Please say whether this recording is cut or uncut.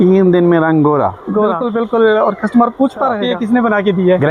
cut